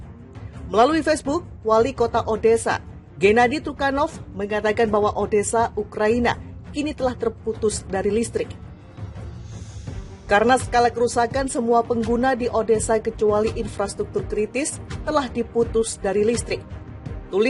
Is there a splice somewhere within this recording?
yes; 2 cuts; at 8.5 s, 10.2 s

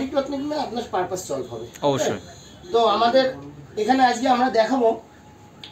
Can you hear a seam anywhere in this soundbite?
no; 0 cuts

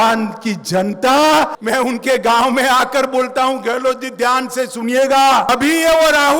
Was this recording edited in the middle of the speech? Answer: yes; 2 cuts; at 1.6 s, 5.5 s

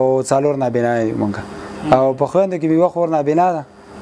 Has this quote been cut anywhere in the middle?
no; 0 cuts

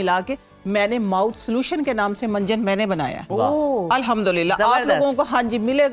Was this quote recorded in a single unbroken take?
yes; 0 cuts

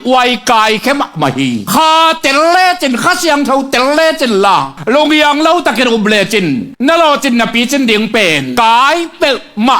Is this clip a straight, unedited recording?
no; 4 cuts; at 1.7 s, 4.7 s, 6.7 s, 8.5 s

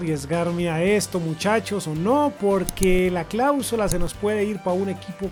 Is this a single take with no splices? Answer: yes; 0 cuts

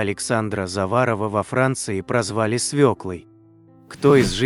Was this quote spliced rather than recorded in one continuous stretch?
yes; 1 cut; at 3.3 s

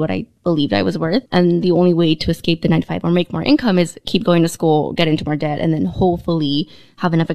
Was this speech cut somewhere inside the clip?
yes; 1 cut; at 1.3 s

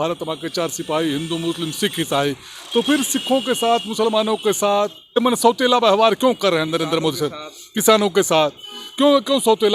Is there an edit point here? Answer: yes; 1 cut; at 5.2 s

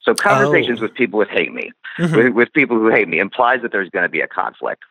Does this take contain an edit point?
no; 0 cuts

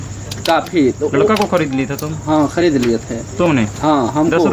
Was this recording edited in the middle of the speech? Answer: no; 0 cuts

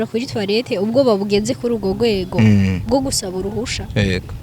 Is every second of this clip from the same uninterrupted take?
yes; 0 cuts

